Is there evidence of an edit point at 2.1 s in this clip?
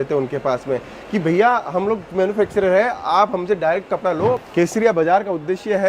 no; 1 cut; at 4.4 s

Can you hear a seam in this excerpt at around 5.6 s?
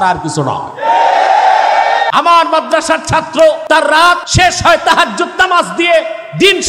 no; 2 cuts; at 2.1 s, 4.0 s

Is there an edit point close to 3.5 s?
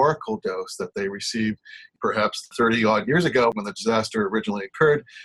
yes; 1 cut; at 3.5 s

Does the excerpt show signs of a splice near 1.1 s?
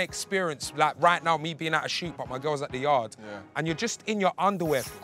no; 0 cuts

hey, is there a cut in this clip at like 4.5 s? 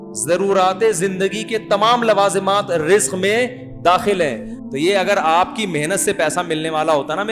yes; 1 cut; at 4.5 s

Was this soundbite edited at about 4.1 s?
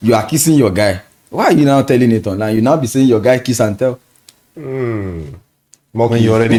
no; 0 cuts

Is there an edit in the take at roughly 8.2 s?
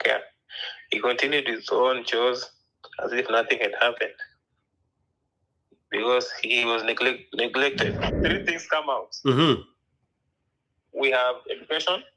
yes; 1 cut; at 8.2 s

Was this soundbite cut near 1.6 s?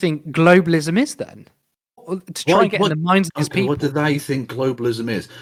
no; 0 cuts

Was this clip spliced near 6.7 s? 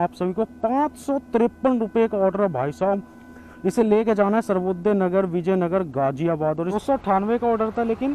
yes; 1 cut; at 6.7 s

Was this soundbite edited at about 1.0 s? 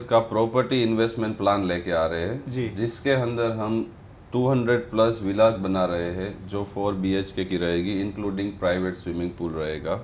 no; 0 cuts

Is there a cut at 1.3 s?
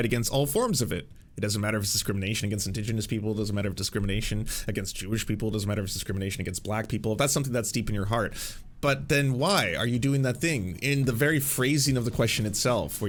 no; 0 cuts

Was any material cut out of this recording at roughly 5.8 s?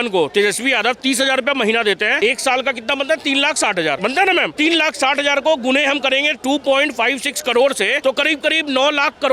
no; 3 cuts; at 2.1 s, 4.3 s, 8.0 s

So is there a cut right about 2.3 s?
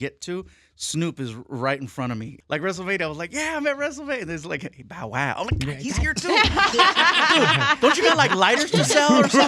yes; 1 cut; at 2.3 s

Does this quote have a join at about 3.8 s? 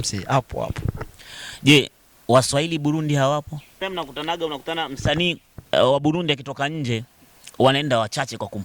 yes; 1 cut; at 3.8 s

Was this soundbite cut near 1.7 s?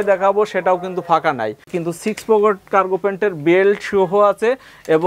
yes; 1 cut; at 1.7 s

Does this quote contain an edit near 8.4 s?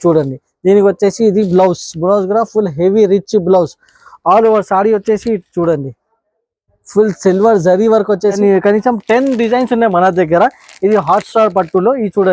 yes; 1 cut; at 8.4 s

